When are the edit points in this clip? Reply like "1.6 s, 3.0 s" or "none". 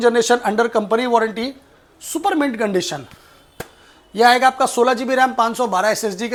none